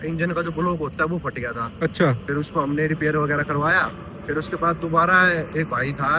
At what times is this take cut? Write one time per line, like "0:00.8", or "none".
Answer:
none